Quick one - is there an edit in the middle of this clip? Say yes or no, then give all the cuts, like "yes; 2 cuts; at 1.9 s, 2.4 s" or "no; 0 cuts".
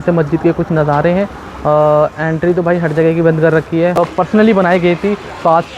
yes; 1 cut; at 4.0 s